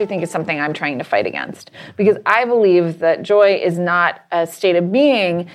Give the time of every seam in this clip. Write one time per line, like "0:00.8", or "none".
none